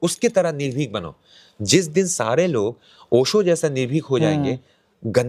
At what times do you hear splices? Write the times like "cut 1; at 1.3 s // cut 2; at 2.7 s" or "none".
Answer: none